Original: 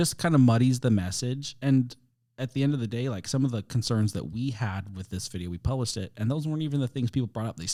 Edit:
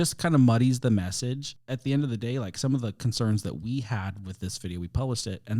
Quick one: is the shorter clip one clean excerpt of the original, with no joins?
no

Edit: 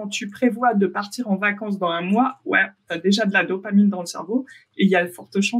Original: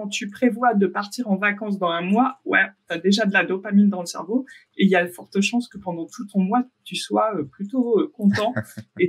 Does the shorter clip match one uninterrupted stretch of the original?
yes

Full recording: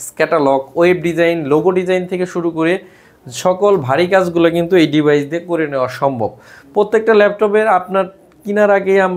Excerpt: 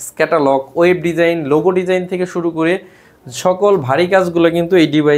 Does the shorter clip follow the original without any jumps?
yes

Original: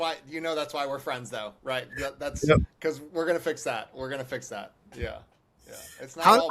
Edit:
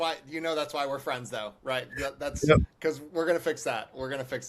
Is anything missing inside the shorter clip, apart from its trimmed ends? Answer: no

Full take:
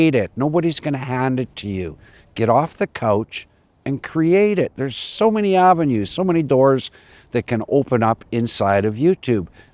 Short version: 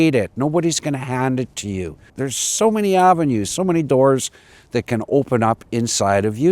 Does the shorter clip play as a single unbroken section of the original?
no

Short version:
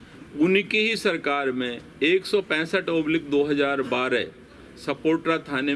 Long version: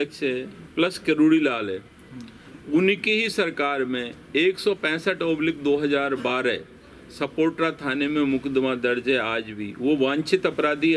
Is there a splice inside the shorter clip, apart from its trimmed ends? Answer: no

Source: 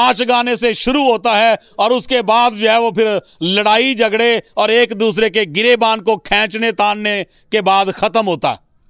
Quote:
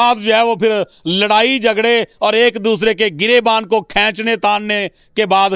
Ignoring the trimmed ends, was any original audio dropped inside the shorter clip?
no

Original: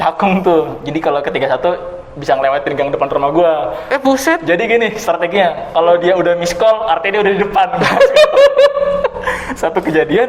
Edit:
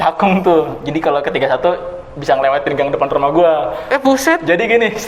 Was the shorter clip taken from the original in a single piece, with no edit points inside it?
yes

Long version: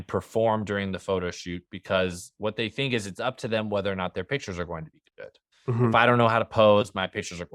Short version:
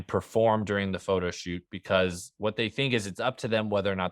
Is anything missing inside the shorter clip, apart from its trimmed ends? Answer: no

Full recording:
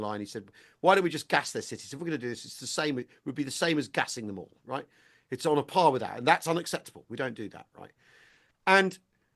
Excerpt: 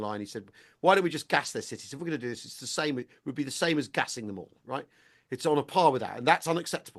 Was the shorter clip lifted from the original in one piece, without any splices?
yes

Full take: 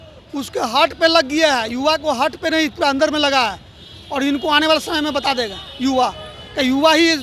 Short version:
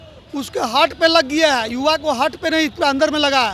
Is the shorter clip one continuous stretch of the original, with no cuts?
yes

